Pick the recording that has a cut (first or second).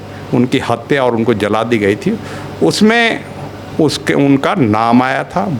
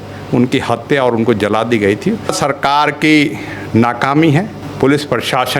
second